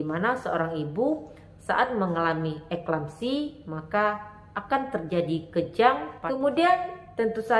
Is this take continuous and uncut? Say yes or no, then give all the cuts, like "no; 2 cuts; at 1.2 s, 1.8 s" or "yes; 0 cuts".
no; 1 cut; at 6.1 s